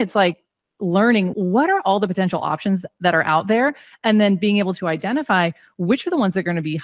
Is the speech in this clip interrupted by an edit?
yes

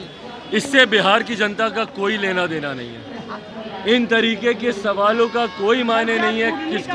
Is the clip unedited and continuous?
yes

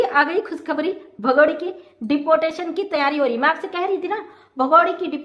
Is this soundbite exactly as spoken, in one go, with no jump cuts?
yes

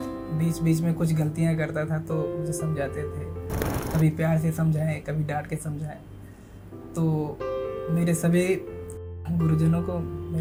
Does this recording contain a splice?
no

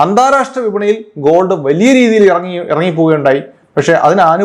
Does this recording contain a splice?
no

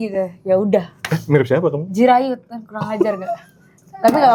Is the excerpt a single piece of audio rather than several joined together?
yes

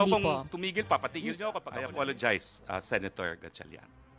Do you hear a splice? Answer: yes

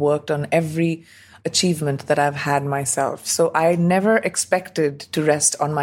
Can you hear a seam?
yes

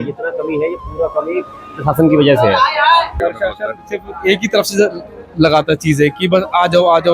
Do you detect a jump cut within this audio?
yes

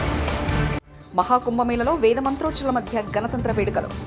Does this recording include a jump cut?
no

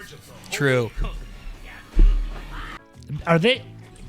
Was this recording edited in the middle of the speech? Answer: yes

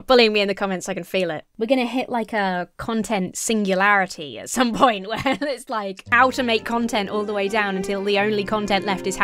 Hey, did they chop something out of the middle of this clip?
yes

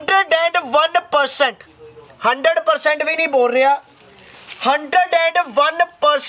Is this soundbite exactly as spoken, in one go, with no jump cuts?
yes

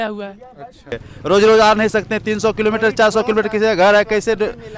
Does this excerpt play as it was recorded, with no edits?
no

